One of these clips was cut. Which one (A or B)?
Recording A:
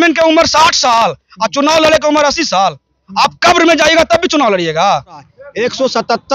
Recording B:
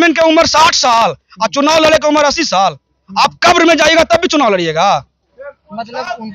A